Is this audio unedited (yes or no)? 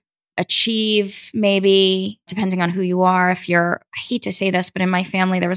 no